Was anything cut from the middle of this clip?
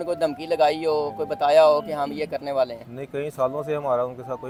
no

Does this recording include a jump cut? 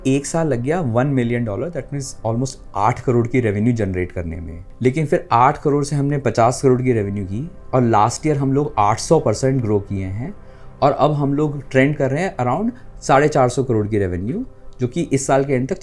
no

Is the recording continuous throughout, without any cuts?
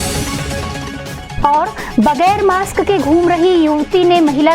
no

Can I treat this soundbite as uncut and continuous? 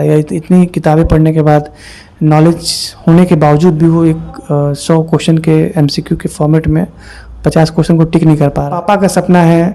no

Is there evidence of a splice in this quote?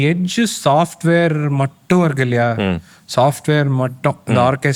no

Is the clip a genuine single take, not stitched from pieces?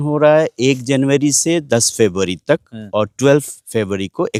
yes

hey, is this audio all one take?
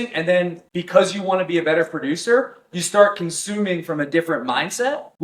yes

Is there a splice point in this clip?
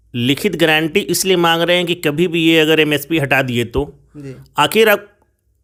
no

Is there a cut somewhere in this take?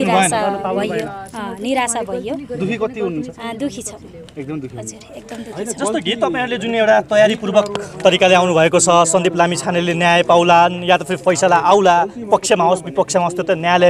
no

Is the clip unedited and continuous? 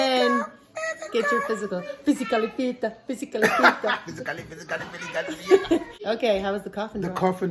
no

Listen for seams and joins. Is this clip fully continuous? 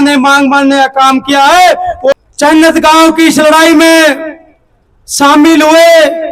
yes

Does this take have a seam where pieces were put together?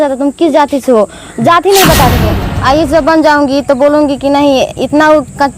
yes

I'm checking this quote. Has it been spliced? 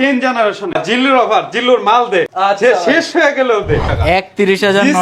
yes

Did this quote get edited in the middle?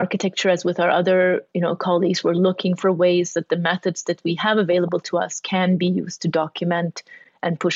no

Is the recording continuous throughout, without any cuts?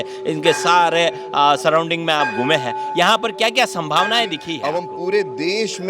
no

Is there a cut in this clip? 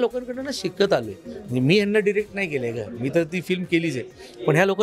no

